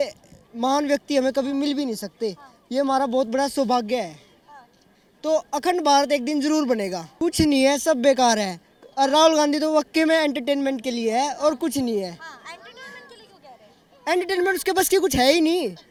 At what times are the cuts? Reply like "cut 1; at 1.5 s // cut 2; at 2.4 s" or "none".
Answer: none